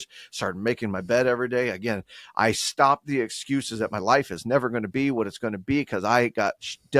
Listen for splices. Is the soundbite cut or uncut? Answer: uncut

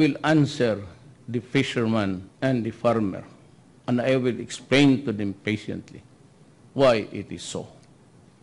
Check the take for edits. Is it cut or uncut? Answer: cut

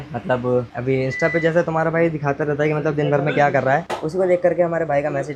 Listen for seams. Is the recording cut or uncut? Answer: uncut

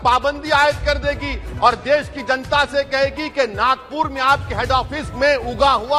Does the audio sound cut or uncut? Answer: uncut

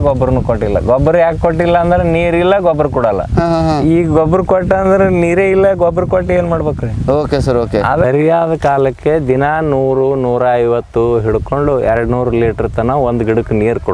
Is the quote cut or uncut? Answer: uncut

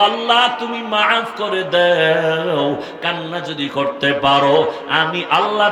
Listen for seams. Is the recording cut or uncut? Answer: uncut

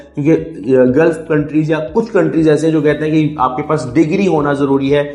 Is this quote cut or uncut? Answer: uncut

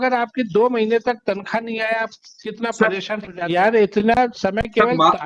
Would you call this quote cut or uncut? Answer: cut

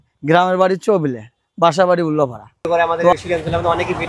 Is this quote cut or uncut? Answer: cut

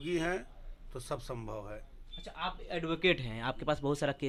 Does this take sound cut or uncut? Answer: uncut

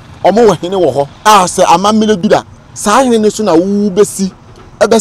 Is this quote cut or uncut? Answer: cut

